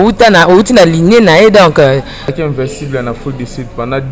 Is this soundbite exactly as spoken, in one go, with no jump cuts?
no; 1 cut; at 2.4 s

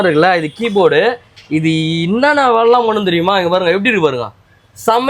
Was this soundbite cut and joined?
no; 0 cuts

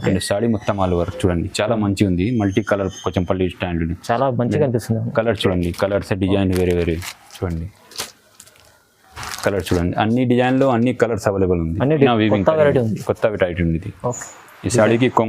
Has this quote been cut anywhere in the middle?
yes; 1 cut; at 12.0 s

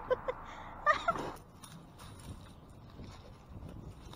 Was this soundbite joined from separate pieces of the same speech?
yes; 1 cut; at 1.3 s

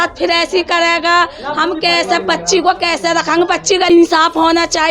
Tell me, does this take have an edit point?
yes; 1 cut; at 3.9 s

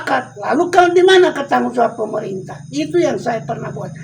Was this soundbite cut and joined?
no; 0 cuts

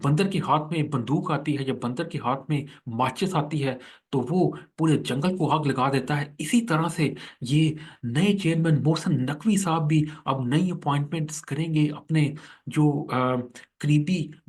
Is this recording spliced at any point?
no; 0 cuts

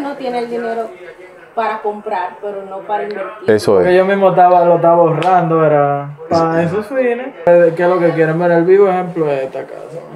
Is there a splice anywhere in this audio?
yes; 1 cut; at 7.4 s

